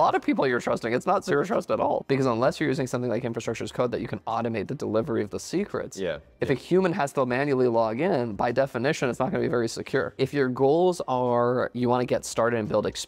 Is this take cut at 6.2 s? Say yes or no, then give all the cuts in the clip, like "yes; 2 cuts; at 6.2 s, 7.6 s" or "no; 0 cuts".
no; 3 cuts; at 2.0 s, 10.1 s, 11.7 s